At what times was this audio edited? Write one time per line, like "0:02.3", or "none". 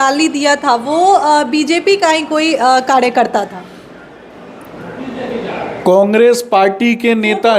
none